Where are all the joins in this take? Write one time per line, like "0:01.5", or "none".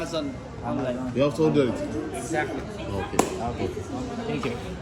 none